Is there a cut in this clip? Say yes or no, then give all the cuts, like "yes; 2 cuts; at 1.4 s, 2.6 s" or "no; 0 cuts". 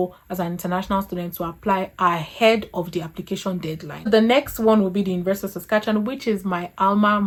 no; 0 cuts